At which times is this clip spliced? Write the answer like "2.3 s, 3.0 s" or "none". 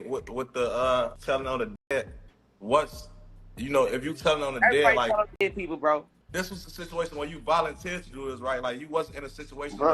1.2 s, 6.2 s